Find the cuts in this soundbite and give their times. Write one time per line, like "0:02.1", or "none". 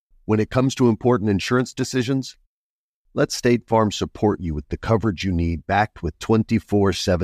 none